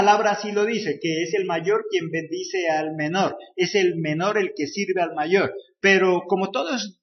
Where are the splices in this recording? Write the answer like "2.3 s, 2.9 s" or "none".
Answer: 1.4 s